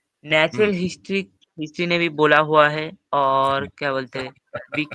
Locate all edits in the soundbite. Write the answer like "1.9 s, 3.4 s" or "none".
none